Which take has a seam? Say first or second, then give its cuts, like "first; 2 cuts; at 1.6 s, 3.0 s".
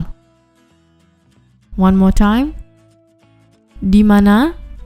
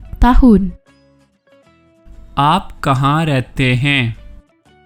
second; 2 cuts; at 0.8 s, 2.3 s